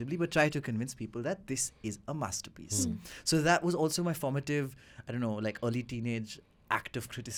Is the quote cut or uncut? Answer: uncut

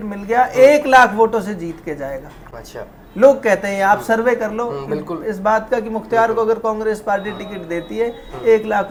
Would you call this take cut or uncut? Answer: uncut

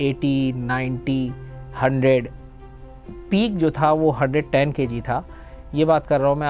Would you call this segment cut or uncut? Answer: uncut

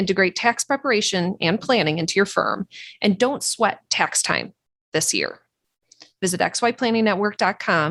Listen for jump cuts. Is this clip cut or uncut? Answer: uncut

